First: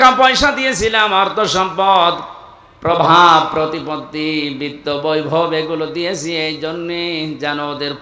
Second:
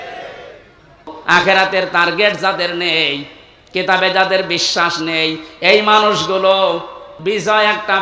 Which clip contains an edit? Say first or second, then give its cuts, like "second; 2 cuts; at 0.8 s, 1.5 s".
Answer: second; 2 cuts; at 1.1 s, 7.1 s